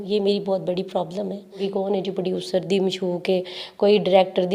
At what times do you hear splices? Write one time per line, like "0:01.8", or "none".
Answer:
0:01.6

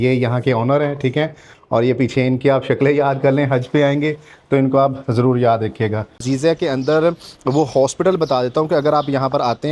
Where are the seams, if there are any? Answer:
0:06.2

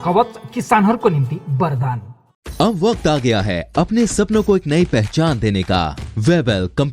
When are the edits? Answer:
0:06.0

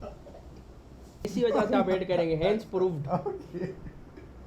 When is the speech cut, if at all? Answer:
0:01.3

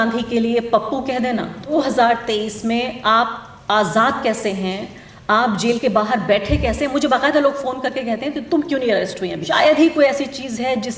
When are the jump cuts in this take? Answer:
0:01.7
0:09.4

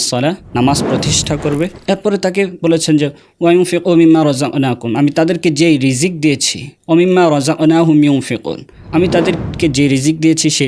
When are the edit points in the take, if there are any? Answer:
none

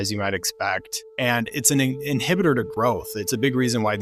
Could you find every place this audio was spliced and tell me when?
0:01.0

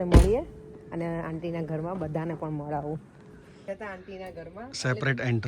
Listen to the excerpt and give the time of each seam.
0:03.7

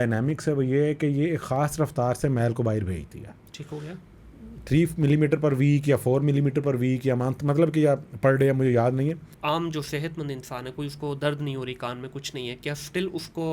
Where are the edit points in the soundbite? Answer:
0:09.3

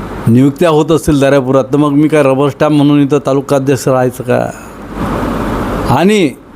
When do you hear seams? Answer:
0:04.9

